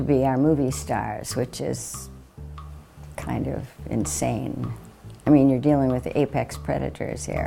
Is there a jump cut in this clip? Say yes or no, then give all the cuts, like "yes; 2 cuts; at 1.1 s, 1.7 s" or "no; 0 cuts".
no; 0 cuts